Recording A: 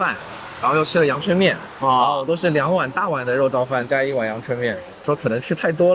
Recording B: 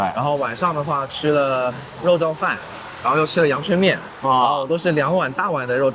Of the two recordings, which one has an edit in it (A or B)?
A